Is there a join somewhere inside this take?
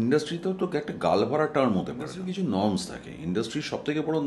yes; 1 cut; at 2.2 s

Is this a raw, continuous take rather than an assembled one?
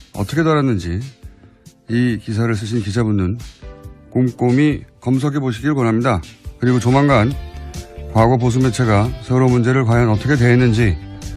no; 1 cut; at 5.5 s

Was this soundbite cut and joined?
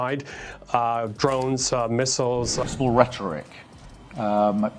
yes; 1 cut; at 2.6 s

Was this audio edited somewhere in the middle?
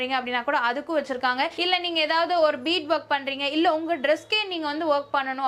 no; 0 cuts

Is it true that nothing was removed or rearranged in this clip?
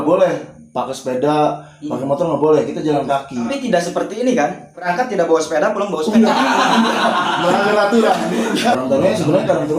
no; 3 cuts; at 3.5 s, 4.9 s, 8.7 s

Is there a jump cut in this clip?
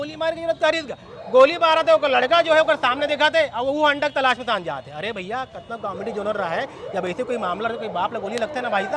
no; 0 cuts

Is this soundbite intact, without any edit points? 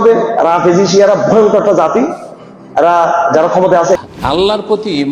no; 1 cut; at 4.0 s

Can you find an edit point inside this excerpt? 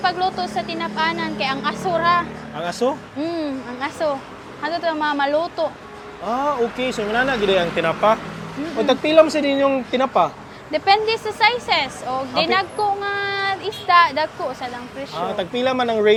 no; 0 cuts

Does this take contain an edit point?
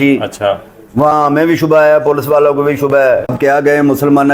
yes; 1 cut; at 3.3 s

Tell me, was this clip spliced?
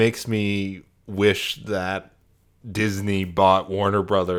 no; 0 cuts

